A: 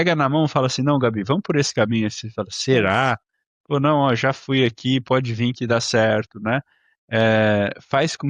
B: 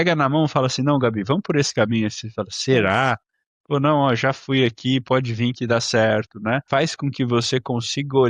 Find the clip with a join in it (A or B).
B